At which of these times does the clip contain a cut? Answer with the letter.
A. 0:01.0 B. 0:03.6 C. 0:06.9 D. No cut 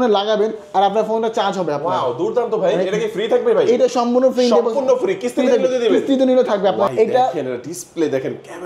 C